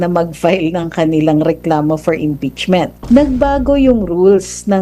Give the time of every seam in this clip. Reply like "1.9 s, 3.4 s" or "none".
3.0 s